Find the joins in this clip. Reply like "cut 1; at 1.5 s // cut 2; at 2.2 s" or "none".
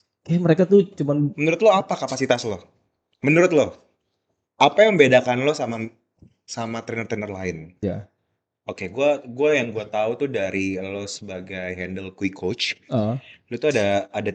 cut 1; at 7.8 s

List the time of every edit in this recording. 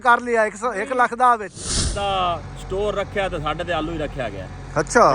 cut 1; at 1.9 s

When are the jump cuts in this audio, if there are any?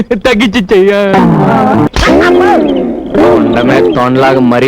cut 1; at 1.9 s

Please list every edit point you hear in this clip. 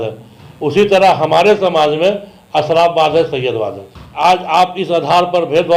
cut 1; at 4.1 s

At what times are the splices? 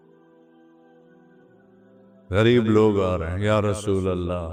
none

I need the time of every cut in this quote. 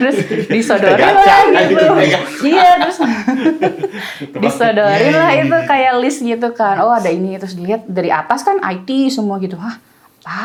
none

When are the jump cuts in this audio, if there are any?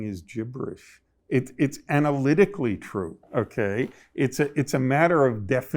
cut 1; at 1.1 s

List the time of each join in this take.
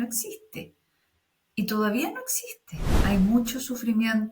cut 1; at 3.0 s

